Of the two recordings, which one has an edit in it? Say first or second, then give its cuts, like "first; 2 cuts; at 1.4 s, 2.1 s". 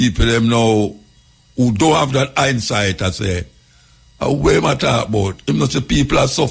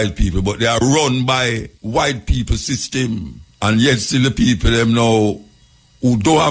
second; 2 cuts; at 1.7 s, 3.4 s